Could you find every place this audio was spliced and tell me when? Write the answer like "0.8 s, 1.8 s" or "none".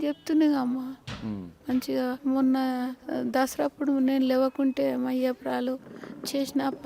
2.2 s, 3.0 s